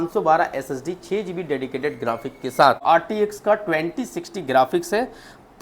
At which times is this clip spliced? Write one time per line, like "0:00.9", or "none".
0:02.8